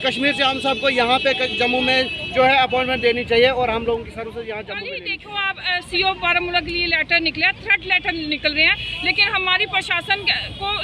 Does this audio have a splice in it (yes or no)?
yes